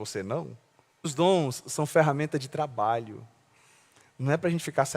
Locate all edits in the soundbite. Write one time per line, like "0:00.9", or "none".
0:01.1